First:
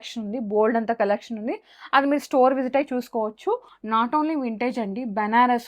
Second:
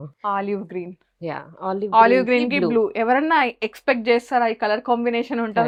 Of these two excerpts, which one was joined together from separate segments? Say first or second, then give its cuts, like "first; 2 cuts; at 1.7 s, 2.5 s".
first; 1 cut; at 3.7 s